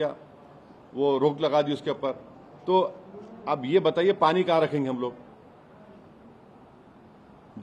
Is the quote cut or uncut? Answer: uncut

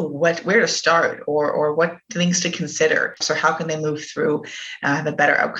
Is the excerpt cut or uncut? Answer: cut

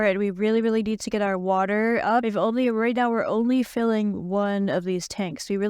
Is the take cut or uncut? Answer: uncut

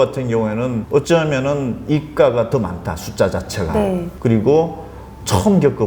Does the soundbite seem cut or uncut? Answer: cut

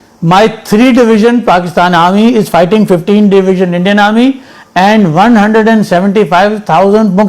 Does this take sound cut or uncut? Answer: uncut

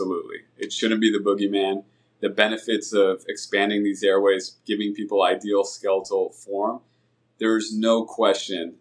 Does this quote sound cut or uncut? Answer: uncut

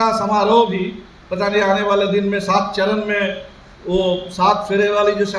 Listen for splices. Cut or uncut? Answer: uncut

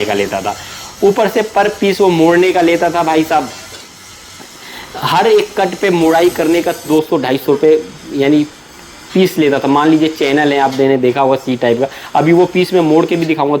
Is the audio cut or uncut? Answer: uncut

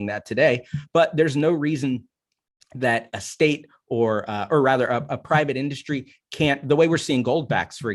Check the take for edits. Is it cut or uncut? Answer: uncut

